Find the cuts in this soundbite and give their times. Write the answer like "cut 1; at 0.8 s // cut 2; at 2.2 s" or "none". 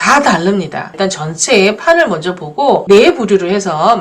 cut 1; at 0.9 s // cut 2; at 2.8 s